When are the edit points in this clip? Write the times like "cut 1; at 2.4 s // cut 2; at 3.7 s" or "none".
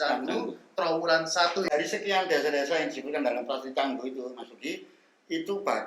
cut 1; at 1.7 s